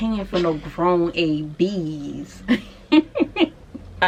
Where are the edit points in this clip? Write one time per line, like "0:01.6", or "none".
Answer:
none

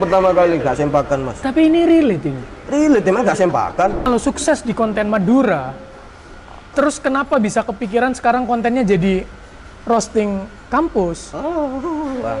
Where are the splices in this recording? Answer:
0:04.1

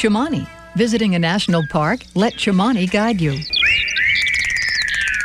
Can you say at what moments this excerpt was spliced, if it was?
0:03.5

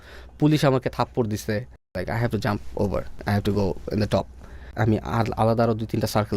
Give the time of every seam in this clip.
0:02.0
0:03.1
0:04.7

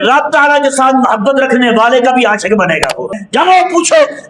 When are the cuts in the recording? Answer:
0:03.1

